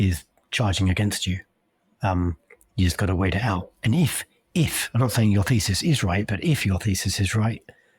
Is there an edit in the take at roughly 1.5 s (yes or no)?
no